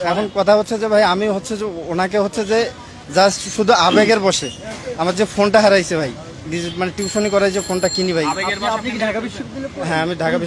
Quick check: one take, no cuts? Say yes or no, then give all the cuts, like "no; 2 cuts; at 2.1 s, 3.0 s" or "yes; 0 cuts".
yes; 0 cuts